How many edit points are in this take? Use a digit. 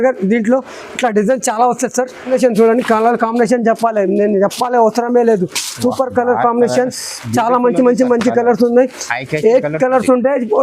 1